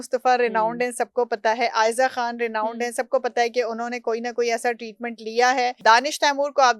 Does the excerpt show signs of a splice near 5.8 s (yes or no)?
yes